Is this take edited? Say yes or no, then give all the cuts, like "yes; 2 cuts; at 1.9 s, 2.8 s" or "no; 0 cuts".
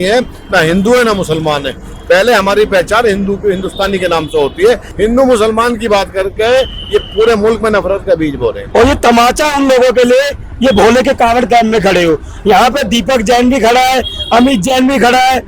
yes; 2 cuts; at 4.9 s, 8.6 s